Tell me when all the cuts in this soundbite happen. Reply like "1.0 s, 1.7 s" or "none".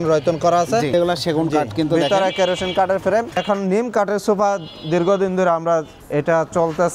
0.9 s, 3.4 s, 6.0 s